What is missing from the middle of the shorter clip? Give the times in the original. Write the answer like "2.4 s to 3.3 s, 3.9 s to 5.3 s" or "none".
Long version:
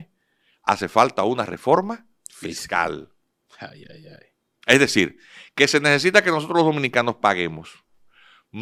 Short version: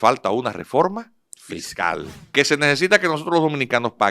3.1 s to 5.4 s

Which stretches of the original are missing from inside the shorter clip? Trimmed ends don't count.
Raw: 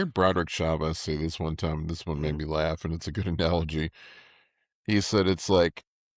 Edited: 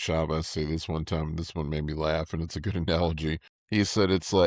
4.0 s to 4.7 s

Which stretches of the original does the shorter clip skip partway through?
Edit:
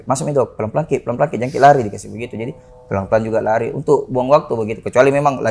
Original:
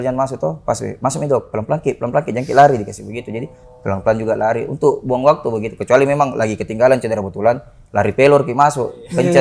none

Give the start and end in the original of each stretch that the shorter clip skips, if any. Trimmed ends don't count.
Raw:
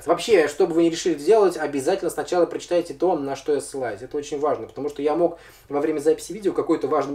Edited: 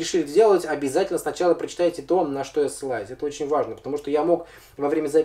none

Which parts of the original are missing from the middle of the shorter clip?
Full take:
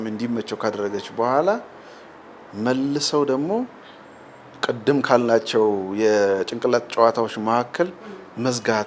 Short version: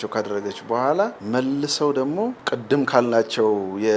1.7 s to 2.5 s, 3.7 s to 4.6 s

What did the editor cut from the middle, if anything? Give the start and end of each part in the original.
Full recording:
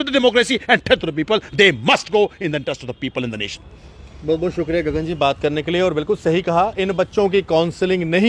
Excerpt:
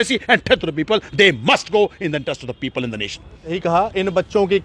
4.0 s to 6.4 s

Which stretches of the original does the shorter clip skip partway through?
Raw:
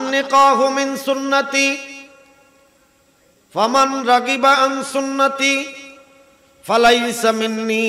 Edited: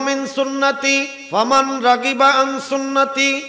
1.9 s to 3.4 s

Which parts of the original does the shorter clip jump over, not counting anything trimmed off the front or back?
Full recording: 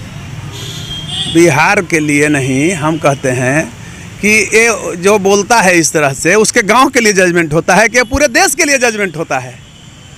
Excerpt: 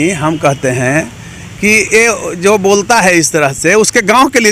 none

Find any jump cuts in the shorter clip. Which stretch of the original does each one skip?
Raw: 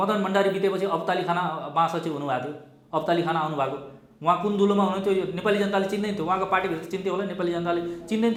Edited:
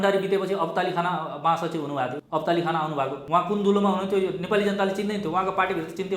2.5 s to 2.8 s, 3.8 s to 4.1 s

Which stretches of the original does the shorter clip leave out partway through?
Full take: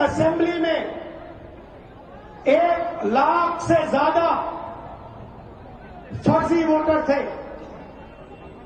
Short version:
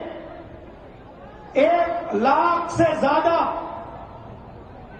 none

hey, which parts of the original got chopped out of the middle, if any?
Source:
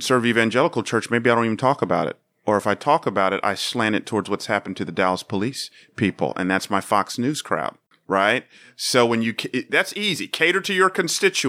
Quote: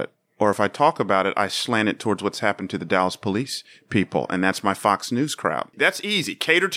7.8 s to 9.7 s

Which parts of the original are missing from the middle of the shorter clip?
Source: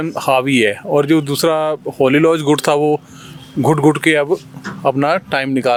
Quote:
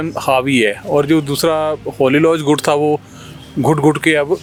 none

